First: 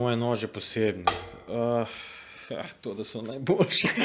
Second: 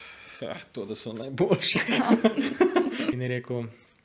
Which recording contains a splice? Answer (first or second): second